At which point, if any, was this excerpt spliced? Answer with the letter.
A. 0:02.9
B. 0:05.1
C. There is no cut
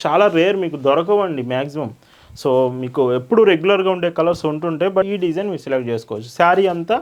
B